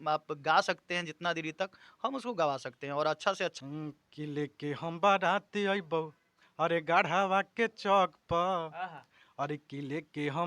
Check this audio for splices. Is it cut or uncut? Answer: cut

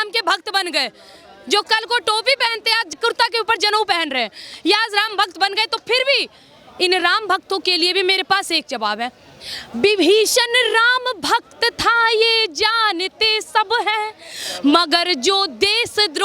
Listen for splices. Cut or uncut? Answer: cut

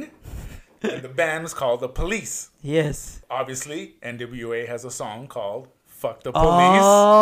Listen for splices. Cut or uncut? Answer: cut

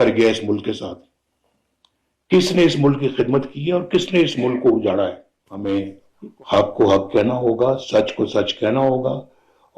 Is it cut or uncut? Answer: cut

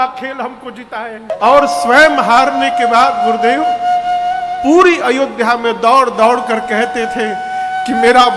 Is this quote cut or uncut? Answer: cut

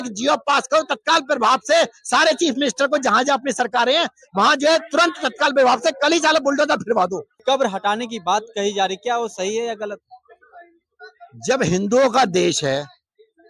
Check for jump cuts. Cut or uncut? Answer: cut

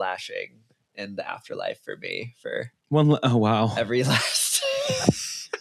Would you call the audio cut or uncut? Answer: uncut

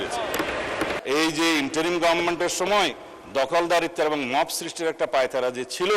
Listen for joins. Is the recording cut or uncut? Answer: cut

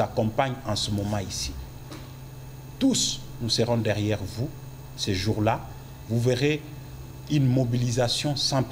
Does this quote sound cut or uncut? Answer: uncut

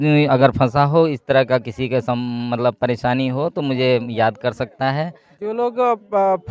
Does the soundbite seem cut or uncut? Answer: uncut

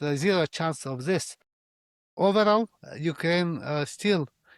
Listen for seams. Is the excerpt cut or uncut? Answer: cut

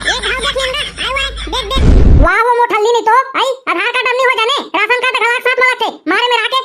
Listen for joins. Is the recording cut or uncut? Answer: cut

